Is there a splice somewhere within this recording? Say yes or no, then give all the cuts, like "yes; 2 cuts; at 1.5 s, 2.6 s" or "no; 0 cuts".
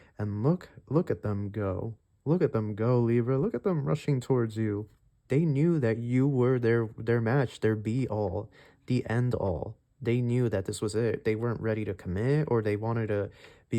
yes; 1 cut; at 5.1 s